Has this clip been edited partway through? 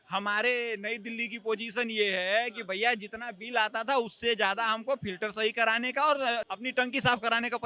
no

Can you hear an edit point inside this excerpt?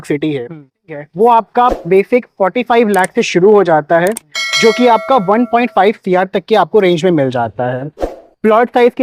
yes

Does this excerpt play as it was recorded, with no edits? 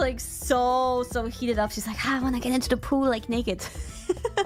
yes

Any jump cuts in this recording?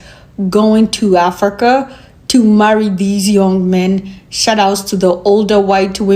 no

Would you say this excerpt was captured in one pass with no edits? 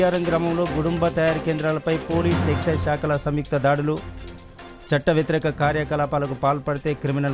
yes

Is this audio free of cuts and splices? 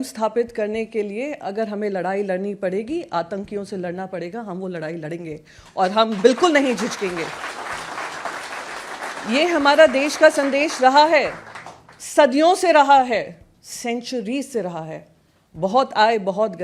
yes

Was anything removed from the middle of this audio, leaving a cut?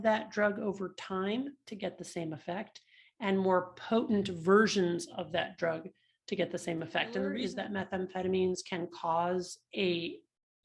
yes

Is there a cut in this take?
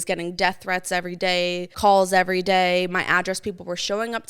yes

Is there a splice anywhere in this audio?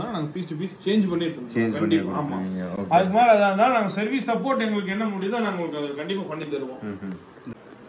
no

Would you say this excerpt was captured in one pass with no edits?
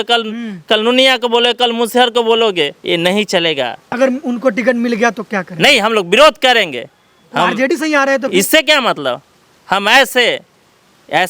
yes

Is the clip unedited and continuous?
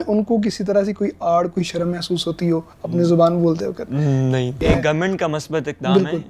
no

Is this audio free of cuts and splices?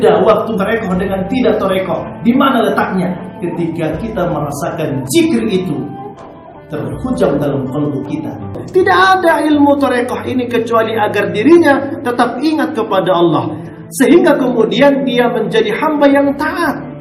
no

